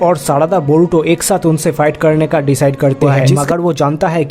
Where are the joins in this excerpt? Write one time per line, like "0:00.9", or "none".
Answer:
0:03.2